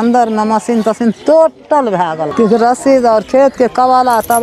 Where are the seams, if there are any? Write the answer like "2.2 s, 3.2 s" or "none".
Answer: 2.3 s